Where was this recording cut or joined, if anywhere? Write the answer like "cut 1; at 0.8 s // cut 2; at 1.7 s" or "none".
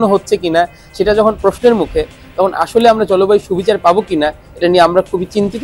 none